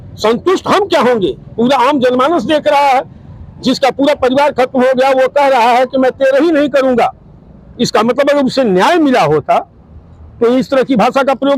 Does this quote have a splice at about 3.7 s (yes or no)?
no